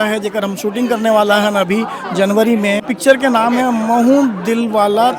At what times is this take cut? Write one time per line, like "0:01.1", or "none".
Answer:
0:02.9